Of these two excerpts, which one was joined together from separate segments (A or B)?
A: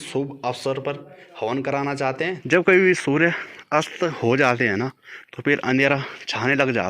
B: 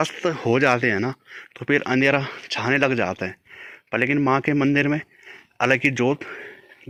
A